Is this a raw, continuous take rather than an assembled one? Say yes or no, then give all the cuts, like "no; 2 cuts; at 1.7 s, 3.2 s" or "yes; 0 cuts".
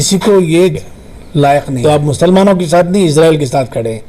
no; 1 cut; at 1.8 s